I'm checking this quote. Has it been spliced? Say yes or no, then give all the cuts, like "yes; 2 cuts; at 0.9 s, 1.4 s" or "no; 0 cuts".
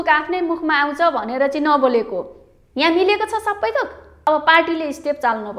yes; 1 cut; at 4.3 s